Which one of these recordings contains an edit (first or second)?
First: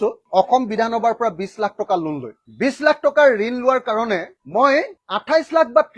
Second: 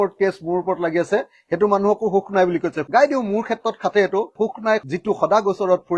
second